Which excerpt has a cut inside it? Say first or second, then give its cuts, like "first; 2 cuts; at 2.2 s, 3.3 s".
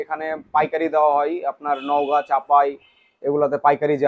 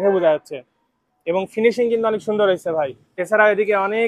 second; 1 cut; at 3.1 s